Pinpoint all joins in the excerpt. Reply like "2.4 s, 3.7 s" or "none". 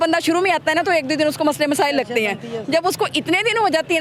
none